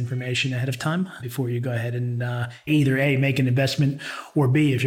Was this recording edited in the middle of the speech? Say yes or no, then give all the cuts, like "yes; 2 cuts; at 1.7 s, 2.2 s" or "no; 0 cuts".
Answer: yes; 2 cuts; at 1.2 s, 2.7 s